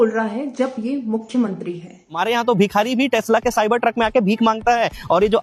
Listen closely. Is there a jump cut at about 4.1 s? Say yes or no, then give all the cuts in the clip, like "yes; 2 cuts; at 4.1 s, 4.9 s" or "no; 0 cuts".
no; 1 cut; at 2.2 s